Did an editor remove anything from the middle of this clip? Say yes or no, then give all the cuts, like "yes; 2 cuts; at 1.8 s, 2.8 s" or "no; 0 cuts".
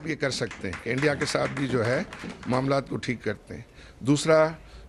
no; 0 cuts